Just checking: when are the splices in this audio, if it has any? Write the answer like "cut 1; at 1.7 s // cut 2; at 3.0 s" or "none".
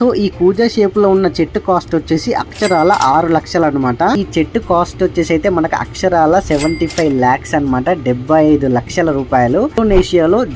cut 1; at 4.2 s // cut 2; at 9.8 s